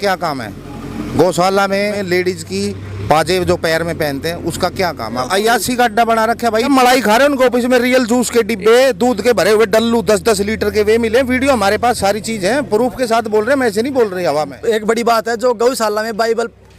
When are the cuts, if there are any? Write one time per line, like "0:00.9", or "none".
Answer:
0:02.0
0:05.2
0:06.7
0:14.5